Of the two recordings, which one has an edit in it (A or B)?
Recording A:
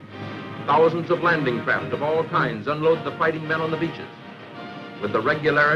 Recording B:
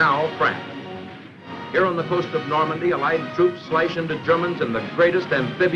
B